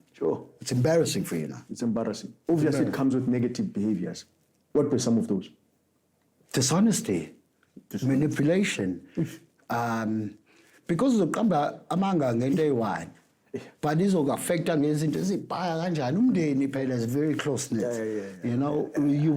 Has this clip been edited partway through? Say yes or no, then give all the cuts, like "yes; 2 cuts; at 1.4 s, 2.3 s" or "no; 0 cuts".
no; 0 cuts